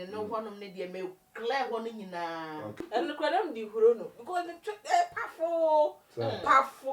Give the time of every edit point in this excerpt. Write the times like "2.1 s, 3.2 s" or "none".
2.8 s